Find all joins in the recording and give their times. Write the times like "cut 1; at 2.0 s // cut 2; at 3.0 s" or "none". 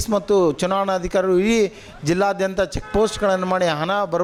none